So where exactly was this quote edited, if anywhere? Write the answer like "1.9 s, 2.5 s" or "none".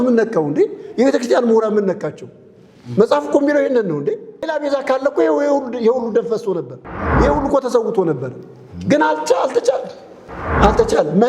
4.5 s